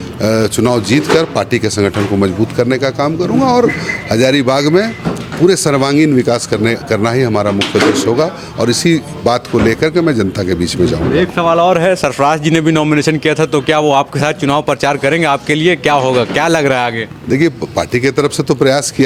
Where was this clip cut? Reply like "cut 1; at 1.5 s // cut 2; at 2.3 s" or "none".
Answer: none